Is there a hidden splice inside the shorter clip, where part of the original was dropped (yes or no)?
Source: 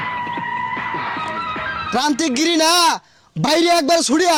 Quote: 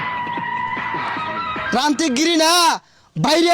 yes